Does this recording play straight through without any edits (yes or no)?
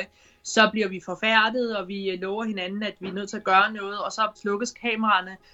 no